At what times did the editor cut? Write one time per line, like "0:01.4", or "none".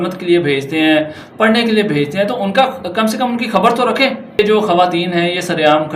0:04.4